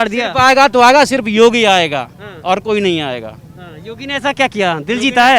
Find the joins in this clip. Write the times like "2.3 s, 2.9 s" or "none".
none